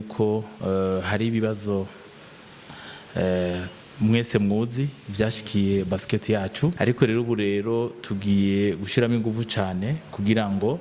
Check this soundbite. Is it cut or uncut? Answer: cut